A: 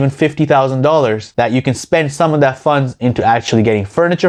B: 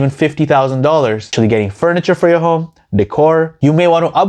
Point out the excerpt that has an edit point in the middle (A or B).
B